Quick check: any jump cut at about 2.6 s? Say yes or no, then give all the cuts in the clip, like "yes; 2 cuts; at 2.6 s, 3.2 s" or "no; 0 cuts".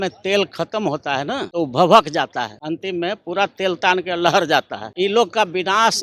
yes; 3 cuts; at 1.5 s, 2.6 s, 4.8 s